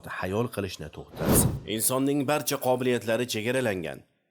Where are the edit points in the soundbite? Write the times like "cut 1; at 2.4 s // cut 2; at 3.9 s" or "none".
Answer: cut 1; at 1.5 s